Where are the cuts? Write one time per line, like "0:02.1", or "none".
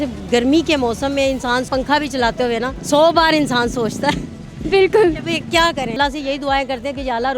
0:01.7
0:02.8
0:06.0